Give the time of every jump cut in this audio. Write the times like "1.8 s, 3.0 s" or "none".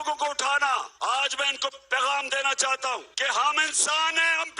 0.9 s, 3.1 s